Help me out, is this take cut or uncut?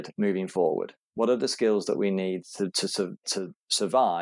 uncut